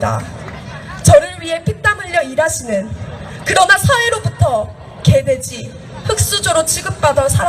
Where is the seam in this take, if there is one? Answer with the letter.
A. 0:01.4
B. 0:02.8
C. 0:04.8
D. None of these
C